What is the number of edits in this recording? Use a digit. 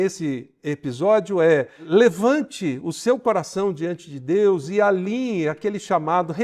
1